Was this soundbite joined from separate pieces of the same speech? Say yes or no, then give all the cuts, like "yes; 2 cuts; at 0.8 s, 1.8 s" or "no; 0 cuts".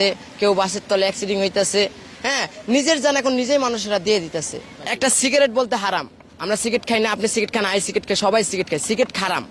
yes; 1 cut; at 4.9 s